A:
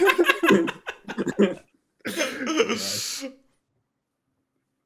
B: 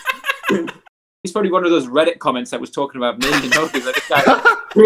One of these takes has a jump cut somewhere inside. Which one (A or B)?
B